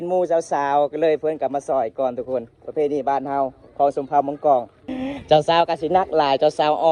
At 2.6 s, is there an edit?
no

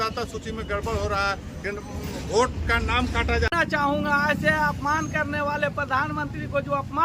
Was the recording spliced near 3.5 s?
yes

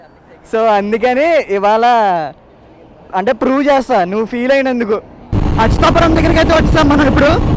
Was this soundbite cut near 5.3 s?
yes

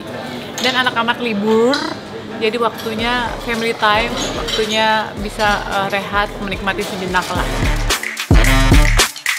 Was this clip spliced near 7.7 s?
no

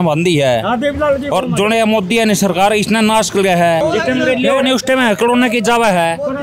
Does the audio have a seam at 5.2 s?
no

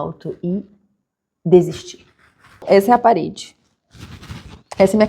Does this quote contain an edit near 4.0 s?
no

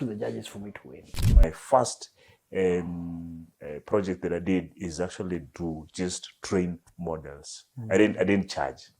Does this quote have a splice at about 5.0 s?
no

